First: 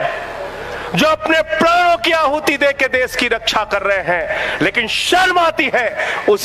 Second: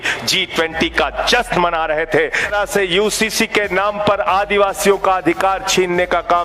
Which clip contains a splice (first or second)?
second